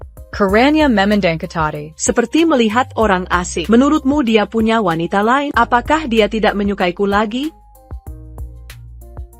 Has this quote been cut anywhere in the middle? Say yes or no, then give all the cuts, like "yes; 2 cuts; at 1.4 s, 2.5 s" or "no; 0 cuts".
yes; 1 cut; at 7.5 s